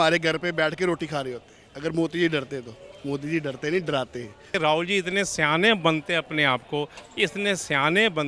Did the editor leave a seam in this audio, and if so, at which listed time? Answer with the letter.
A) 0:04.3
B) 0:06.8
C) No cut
C